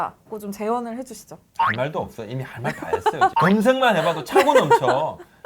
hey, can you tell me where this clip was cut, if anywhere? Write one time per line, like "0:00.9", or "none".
0:03.3